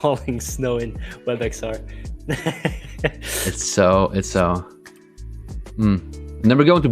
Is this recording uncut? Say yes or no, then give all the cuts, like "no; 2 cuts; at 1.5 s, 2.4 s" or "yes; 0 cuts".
yes; 0 cuts